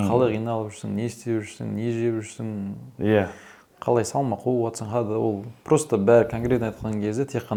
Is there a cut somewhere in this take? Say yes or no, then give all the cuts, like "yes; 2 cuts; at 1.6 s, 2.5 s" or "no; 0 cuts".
no; 0 cuts